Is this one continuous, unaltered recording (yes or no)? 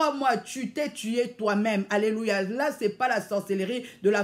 yes